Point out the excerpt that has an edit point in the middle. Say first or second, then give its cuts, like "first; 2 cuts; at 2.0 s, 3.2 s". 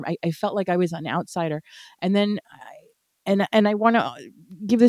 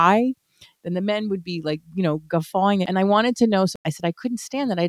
second; 2 cuts; at 2.9 s, 3.7 s